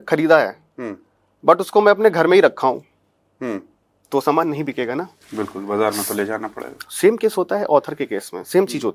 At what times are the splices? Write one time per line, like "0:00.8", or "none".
none